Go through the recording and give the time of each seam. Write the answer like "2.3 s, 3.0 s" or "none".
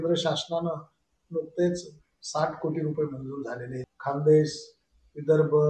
3.8 s

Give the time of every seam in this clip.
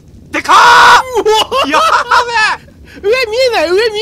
none

